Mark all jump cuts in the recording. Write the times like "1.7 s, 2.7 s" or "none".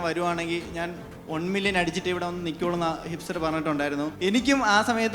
4.1 s